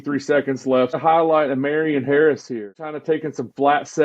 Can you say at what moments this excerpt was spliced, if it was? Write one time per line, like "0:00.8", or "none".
0:00.9
0:03.0